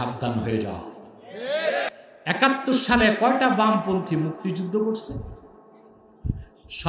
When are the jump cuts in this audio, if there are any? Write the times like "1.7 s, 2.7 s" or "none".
1.9 s